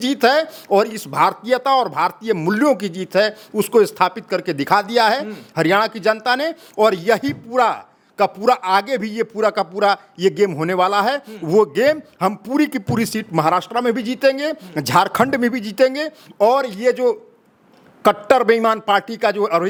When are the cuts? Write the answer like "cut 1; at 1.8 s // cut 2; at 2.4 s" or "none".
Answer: none